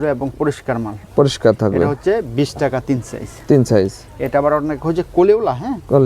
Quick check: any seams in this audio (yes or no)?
no